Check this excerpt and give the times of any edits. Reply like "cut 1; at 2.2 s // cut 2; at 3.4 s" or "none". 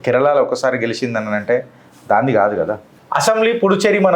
cut 1; at 2.9 s